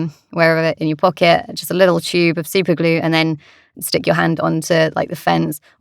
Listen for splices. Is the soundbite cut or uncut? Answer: cut